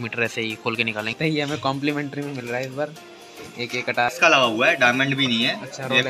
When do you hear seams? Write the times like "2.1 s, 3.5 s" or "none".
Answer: 1.2 s, 4.1 s